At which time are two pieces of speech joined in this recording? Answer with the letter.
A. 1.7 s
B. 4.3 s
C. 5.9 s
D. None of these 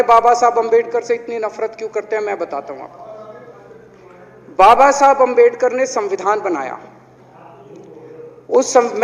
D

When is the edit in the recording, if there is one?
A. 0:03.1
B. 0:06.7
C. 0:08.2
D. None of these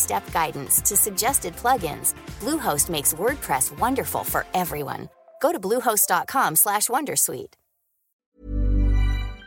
C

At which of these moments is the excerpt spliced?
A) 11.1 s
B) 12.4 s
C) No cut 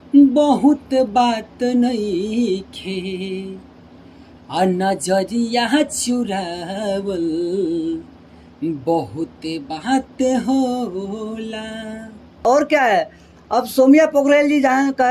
B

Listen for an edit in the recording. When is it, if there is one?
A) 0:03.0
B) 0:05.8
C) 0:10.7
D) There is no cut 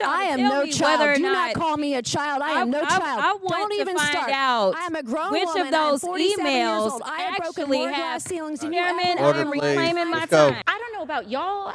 C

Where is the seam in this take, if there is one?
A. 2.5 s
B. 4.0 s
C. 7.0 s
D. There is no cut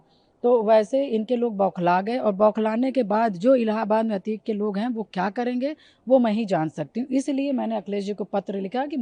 D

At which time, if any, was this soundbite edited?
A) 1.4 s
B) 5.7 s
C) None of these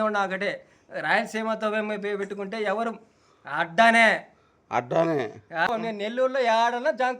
B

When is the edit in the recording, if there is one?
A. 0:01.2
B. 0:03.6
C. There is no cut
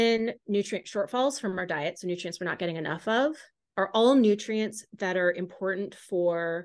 C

